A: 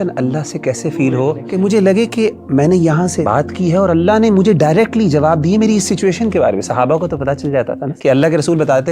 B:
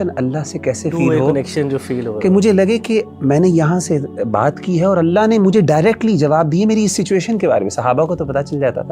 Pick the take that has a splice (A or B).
A